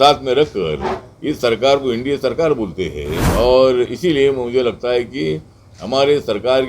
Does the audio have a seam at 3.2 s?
yes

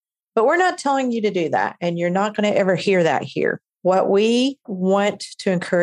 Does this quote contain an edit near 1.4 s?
no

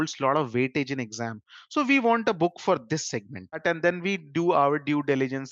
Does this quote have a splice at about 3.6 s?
yes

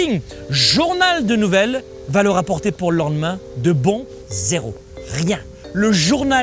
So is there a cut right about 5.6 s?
yes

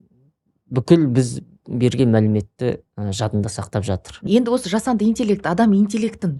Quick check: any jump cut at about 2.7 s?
no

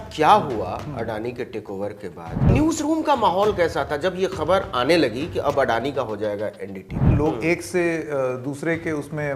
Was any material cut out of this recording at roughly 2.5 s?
yes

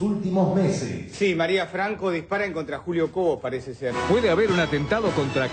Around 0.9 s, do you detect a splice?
yes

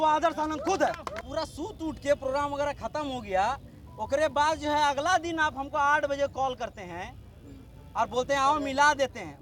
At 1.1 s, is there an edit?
yes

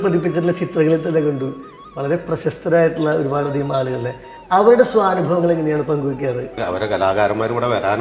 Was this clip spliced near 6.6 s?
yes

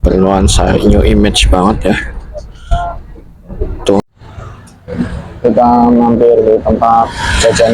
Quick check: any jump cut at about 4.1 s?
yes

